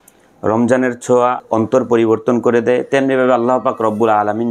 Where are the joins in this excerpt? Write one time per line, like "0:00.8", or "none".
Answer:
0:01.4